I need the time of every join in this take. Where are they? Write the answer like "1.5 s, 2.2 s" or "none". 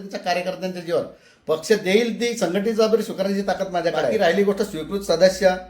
4.1 s

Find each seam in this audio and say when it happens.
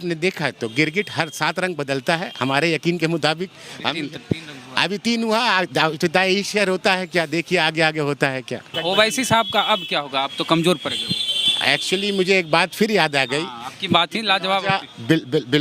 8.8 s

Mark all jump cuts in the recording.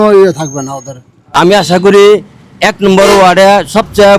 1.3 s

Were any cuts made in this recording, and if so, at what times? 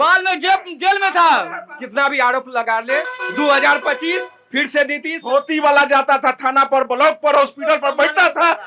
1.8 s, 5.1 s

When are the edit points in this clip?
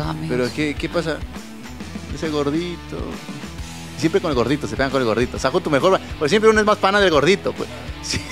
none

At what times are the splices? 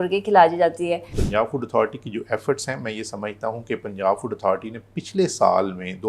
1.2 s

